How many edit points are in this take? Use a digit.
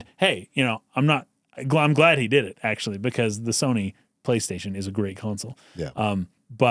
0